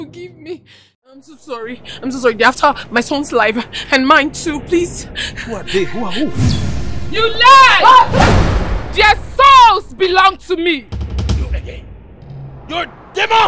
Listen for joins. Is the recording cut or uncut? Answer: cut